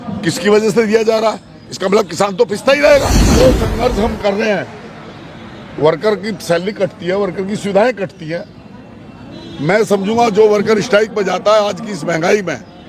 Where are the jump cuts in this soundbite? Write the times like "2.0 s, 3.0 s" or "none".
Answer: 3.3 s